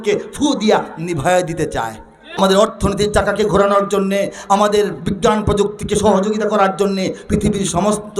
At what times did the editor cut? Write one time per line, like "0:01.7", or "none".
0:02.4